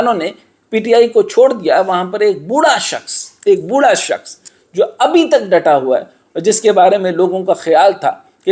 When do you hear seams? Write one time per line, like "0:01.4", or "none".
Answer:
none

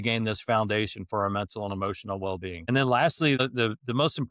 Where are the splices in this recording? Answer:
0:02.6
0:03.4

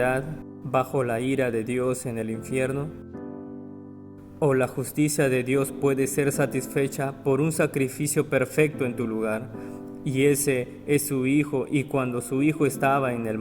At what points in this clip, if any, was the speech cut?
none

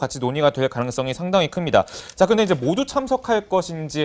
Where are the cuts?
0:02.0

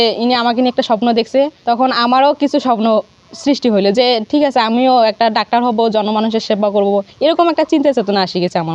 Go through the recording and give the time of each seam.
none

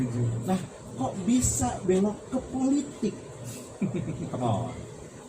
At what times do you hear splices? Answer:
none

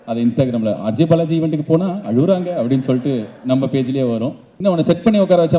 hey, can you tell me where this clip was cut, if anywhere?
0:04.5

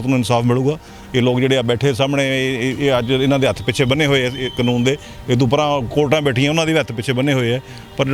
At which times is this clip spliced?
none

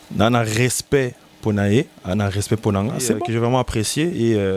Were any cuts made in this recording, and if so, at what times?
0:03.2

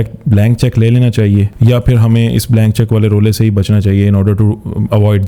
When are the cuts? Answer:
0:01.5

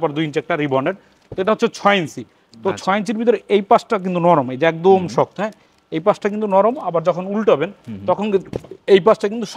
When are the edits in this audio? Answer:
none

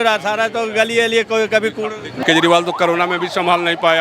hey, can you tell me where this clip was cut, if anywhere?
0:02.2

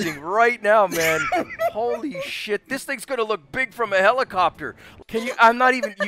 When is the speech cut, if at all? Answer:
0:04.9

